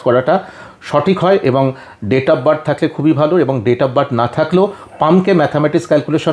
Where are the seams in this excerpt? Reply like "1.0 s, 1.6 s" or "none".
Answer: none